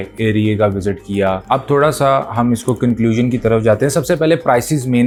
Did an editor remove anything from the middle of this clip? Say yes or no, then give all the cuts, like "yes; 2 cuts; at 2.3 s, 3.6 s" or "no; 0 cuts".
no; 0 cuts